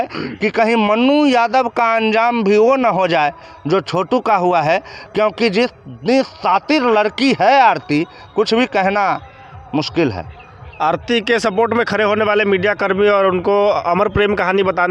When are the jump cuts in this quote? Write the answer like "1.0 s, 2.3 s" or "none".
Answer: none